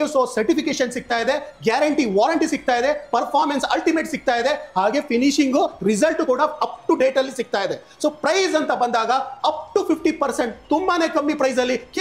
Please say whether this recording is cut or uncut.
uncut